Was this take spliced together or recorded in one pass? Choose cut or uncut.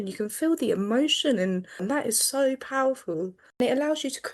cut